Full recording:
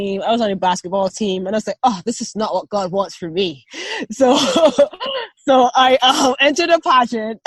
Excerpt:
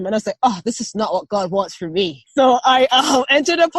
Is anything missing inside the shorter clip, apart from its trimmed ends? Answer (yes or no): yes